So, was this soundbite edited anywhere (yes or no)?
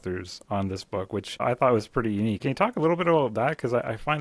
yes